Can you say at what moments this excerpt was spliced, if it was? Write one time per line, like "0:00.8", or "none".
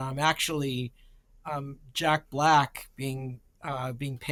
none